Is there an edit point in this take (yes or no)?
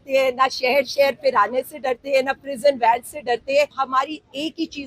yes